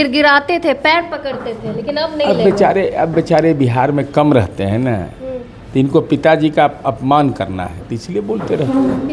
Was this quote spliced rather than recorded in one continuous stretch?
no; 0 cuts

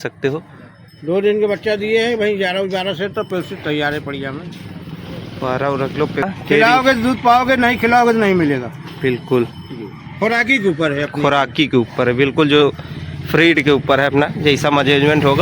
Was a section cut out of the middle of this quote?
yes; 1 cut; at 6.2 s

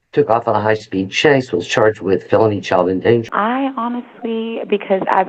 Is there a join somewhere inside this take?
yes; 1 cut; at 3.2 s

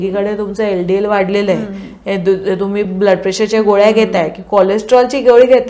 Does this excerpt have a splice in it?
no; 0 cuts

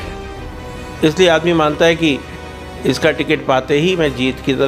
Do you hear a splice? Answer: no; 0 cuts

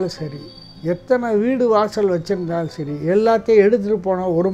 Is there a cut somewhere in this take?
no; 0 cuts

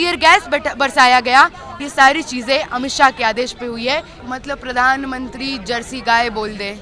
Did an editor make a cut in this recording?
yes; 2 cuts; at 1.7 s, 4.2 s

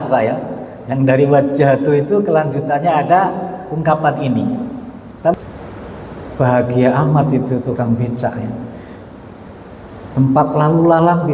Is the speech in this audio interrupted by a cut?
yes; 1 cut; at 5.3 s

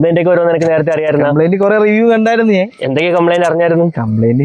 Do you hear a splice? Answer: no; 0 cuts

